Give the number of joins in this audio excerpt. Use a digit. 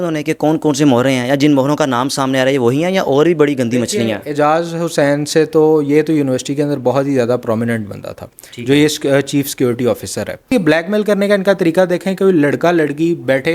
1